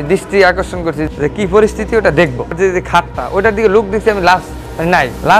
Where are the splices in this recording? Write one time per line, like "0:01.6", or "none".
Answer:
0:01.0
0:02.5